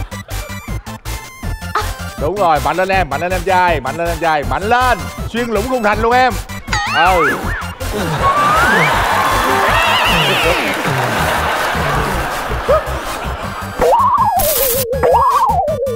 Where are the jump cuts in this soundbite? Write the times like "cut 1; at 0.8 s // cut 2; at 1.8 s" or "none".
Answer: none